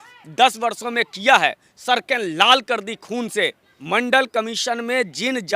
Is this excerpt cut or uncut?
cut